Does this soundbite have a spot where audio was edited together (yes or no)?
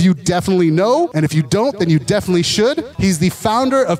yes